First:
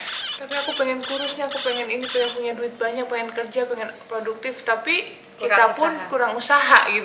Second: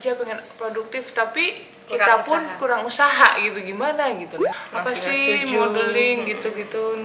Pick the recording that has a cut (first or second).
second